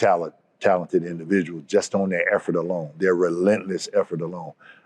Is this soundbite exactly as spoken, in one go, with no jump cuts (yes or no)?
yes